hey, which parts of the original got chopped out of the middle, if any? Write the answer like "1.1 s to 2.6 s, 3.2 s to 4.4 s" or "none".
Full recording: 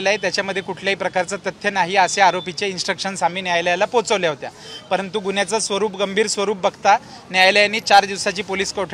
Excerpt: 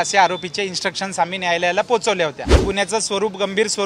4.7 s to 5.2 s